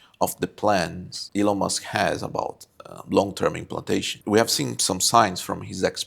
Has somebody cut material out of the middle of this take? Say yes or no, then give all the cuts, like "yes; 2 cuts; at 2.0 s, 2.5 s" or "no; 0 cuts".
yes; 2 cuts; at 1.1 s, 4.1 s